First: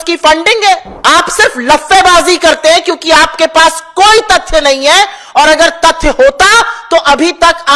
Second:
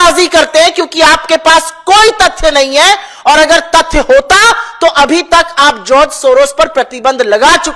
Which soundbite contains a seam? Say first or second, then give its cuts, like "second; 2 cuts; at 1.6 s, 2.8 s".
first; 1 cut; at 0.9 s